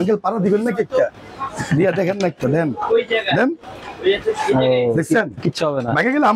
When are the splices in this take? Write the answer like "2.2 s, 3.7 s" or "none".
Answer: none